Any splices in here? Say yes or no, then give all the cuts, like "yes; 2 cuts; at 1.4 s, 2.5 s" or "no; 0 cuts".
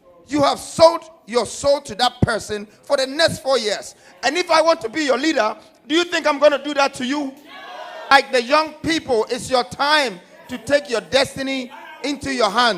yes; 1 cut; at 8.1 s